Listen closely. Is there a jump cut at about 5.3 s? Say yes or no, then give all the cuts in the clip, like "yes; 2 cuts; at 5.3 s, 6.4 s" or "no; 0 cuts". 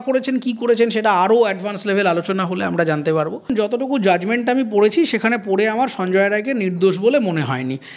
no; 1 cut; at 3.5 s